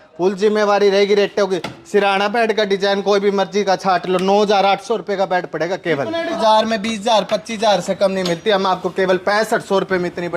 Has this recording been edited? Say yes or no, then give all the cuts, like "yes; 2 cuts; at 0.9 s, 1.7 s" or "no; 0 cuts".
yes; 1 cut; at 6.4 s